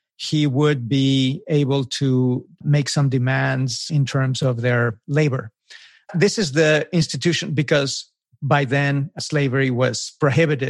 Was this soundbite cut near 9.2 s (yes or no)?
yes